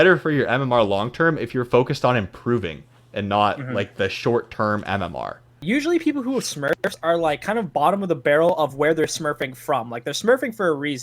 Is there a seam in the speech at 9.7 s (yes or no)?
no